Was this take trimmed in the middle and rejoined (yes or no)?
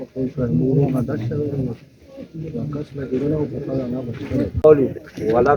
yes